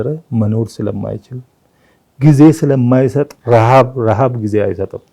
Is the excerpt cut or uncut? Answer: uncut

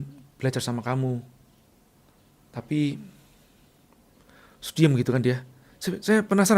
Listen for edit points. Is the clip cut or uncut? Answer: cut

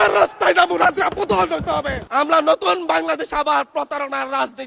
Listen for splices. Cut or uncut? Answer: cut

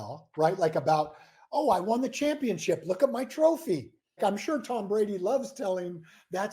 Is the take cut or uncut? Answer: cut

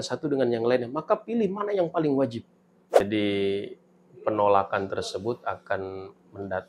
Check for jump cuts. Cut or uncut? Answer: cut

